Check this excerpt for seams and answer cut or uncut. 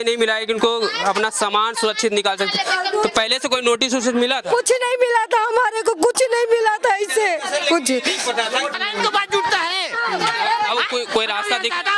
cut